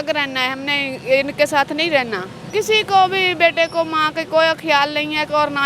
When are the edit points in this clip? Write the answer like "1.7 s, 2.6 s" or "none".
2.4 s